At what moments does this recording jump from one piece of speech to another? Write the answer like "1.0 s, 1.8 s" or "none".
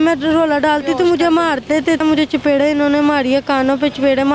2.0 s